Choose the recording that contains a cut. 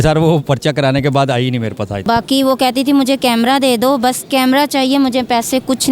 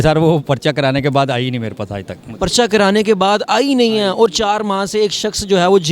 first; 1 cut; at 2.0 s

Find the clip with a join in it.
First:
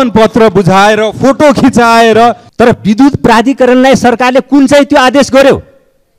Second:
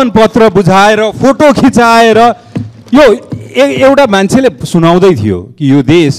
first; 1 cut; at 2.4 s

